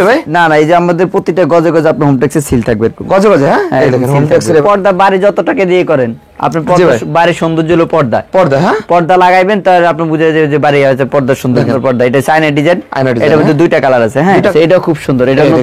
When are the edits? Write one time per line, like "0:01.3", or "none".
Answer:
0:04.6
0:11.7
0:14.5